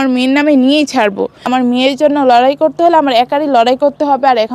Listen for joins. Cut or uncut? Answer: cut